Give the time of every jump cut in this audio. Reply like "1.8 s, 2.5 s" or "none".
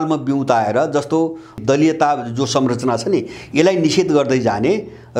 1.6 s

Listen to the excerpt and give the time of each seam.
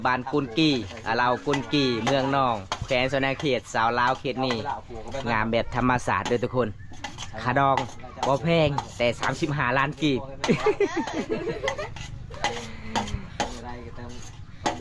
none

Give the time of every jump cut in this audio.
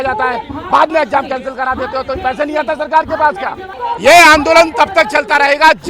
3.7 s

